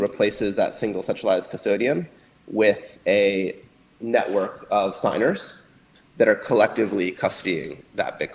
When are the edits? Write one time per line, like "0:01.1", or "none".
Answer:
none

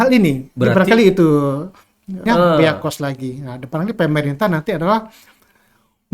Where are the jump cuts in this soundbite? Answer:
0:02.2

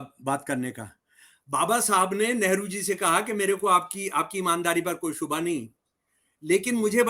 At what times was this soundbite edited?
none

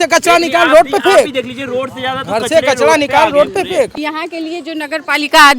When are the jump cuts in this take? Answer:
0:03.9

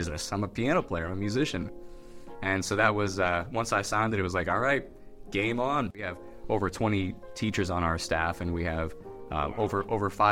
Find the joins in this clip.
0:06.1

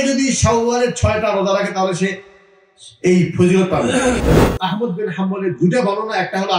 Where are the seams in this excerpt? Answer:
0:04.2

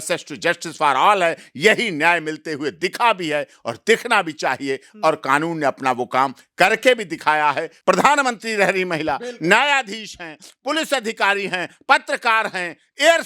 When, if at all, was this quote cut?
0:07.7

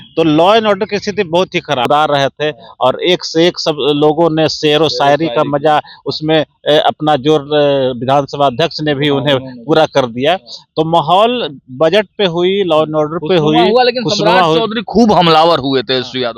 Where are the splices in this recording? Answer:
0:01.9

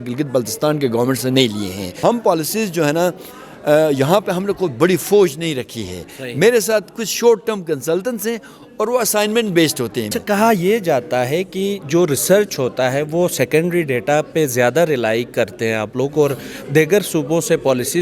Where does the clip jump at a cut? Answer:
0:01.9
0:10.1

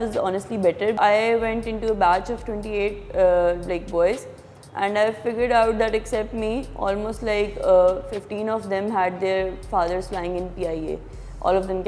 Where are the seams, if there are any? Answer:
0:01.0

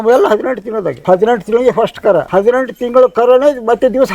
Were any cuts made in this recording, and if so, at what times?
0:01.0
0:02.3

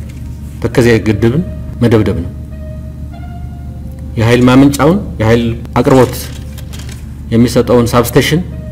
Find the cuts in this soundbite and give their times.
0:01.6
0:05.6

